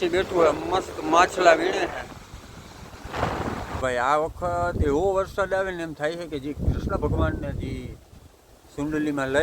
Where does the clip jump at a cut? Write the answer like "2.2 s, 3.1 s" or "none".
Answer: 3.8 s